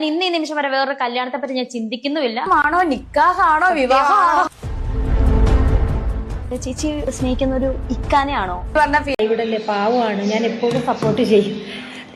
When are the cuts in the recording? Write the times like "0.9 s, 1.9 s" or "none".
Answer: 9.1 s